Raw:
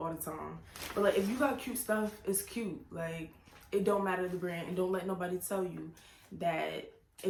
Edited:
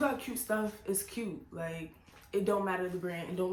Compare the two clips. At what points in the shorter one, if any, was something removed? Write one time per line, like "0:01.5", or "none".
none